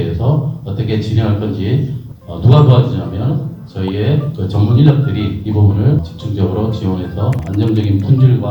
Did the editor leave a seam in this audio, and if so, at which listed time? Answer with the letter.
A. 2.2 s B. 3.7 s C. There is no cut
A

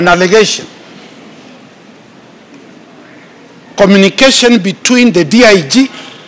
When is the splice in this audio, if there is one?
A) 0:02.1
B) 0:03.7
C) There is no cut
C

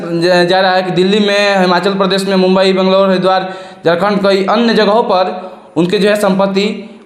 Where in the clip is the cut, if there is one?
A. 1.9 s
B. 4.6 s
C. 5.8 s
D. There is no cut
D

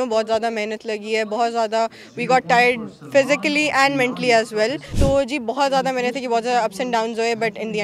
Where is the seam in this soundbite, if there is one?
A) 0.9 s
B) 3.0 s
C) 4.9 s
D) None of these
C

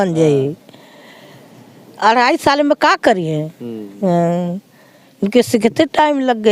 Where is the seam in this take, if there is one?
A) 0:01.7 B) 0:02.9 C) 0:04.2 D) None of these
D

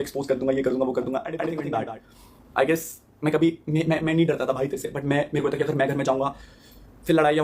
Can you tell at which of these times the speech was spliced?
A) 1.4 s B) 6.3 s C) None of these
A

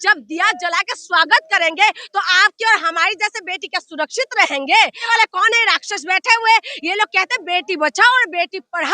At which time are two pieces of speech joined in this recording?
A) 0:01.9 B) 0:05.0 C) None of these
B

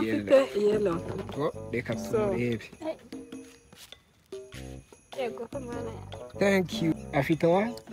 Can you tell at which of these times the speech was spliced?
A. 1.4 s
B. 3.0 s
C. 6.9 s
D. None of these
C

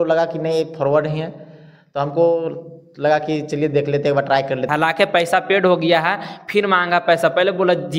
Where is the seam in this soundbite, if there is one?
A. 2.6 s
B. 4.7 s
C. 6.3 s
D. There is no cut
B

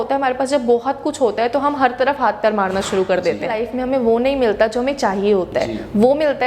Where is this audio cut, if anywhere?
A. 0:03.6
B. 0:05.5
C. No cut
A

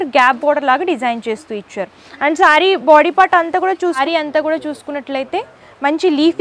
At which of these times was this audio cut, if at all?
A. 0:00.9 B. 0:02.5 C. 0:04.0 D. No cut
C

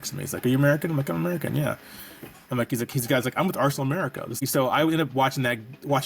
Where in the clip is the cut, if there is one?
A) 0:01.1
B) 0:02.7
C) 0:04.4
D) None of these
C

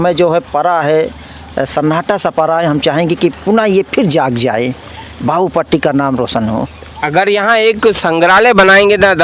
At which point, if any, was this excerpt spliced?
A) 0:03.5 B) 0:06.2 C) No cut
C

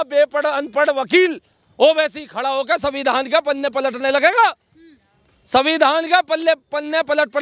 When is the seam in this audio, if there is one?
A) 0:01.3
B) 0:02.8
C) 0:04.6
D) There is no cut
D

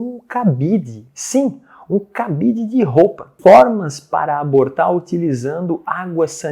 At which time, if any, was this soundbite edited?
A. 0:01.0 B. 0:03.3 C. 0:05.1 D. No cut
B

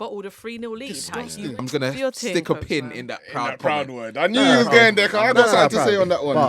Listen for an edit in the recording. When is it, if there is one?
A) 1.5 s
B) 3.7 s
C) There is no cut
A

